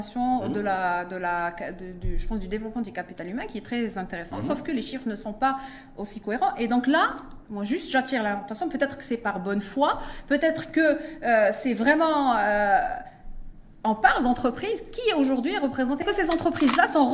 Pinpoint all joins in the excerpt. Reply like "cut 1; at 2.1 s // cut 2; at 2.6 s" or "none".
cut 1; at 16.0 s